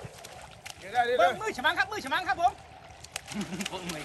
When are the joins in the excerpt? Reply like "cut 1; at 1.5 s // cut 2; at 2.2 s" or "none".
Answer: none